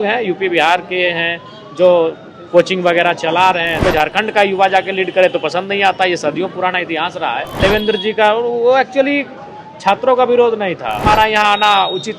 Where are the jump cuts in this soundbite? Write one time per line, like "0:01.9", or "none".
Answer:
0:03.8
0:07.6
0:11.0

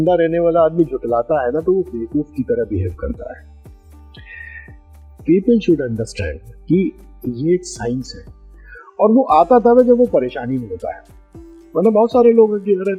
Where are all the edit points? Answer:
none

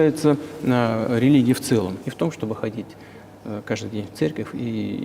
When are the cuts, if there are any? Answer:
0:02.0

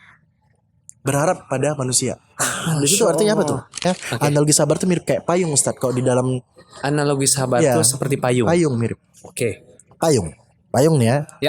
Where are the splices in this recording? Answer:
0:03.8

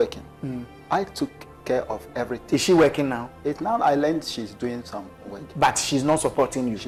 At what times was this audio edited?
none

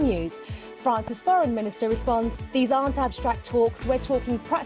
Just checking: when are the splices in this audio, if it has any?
0:02.9

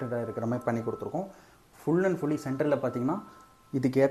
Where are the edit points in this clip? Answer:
none

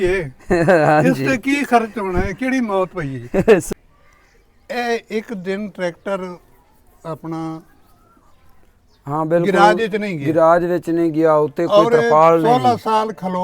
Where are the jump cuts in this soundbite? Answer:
0:03.7

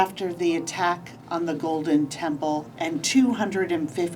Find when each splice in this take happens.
none

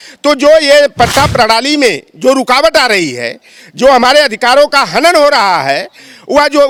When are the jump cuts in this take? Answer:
none

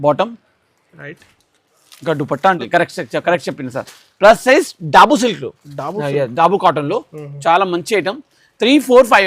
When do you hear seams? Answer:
0:02.6

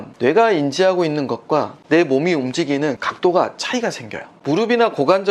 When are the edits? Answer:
0:01.8
0:03.0
0:04.3

